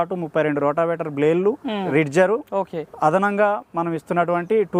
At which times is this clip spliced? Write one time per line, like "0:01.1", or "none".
0:01.8